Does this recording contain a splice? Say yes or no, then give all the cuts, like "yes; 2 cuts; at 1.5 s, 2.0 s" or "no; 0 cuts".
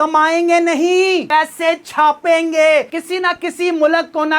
yes; 1 cut; at 2.9 s